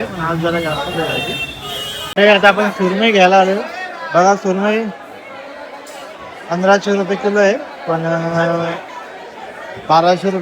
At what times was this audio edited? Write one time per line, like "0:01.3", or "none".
0:02.0